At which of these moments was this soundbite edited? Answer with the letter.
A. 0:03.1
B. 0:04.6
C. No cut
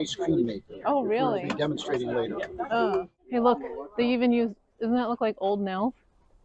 A